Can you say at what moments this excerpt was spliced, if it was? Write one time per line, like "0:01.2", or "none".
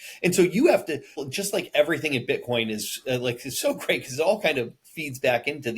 0:01.1